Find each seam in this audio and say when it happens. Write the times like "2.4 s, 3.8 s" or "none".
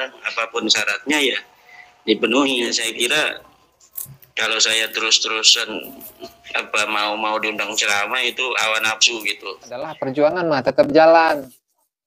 2.8 s, 10.0 s